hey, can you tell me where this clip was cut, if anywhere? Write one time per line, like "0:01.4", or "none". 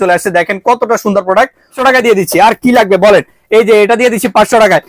0:01.8